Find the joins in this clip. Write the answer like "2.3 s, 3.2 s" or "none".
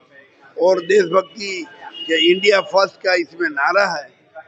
none